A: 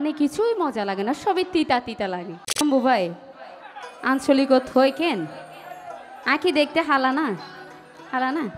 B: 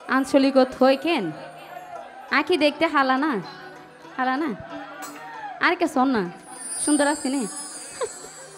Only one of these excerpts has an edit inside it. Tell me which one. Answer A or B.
A